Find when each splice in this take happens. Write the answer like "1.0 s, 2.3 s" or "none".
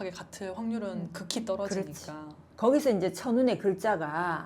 2.5 s